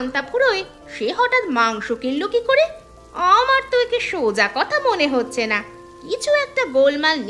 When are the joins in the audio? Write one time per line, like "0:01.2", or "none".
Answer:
none